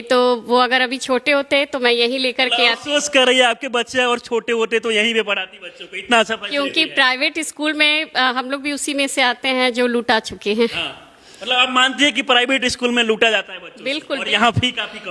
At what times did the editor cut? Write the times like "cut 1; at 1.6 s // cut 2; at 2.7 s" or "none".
none